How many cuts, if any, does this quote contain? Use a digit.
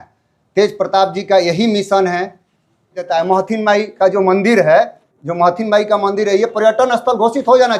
1